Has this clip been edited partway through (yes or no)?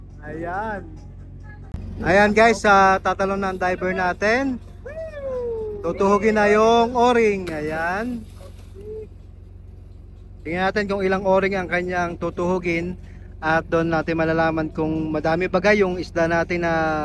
yes